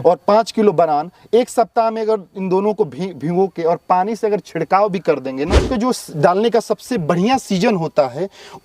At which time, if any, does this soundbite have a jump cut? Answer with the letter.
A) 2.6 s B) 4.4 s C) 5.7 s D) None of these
C